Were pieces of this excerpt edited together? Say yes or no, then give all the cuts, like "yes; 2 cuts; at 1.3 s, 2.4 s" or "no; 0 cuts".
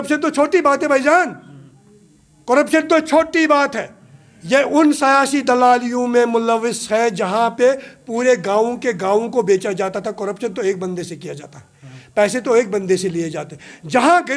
no; 0 cuts